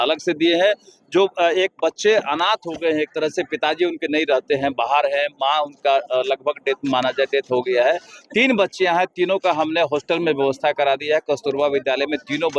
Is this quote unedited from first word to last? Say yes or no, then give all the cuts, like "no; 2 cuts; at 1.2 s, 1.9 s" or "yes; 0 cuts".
yes; 0 cuts